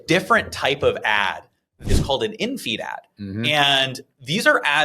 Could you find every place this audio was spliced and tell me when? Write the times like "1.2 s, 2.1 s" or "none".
1.8 s